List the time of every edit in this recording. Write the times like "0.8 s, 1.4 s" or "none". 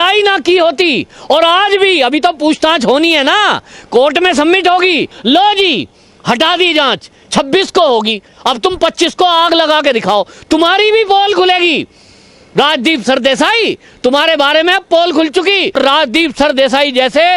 5.1 s, 15.8 s